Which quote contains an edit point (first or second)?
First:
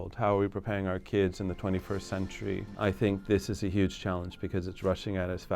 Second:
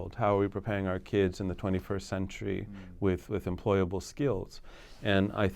first